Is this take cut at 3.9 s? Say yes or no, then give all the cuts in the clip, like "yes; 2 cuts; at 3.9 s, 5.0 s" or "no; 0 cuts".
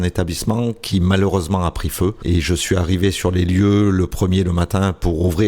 no; 1 cut; at 2.2 s